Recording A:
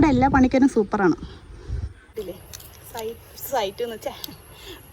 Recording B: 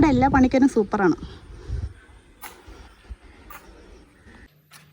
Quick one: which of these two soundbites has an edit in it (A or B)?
A